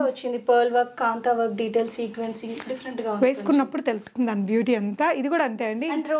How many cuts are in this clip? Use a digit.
0